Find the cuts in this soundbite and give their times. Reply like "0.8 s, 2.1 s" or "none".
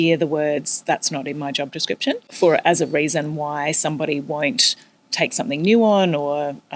2.3 s